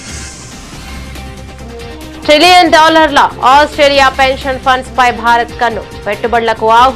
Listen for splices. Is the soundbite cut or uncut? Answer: cut